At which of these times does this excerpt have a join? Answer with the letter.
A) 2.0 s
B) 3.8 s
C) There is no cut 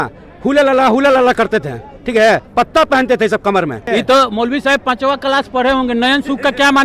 B